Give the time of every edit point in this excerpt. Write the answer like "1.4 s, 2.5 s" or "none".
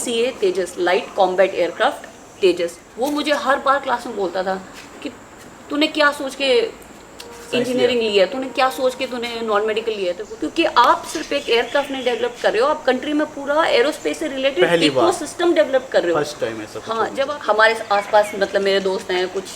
2.8 s, 10.3 s, 17.2 s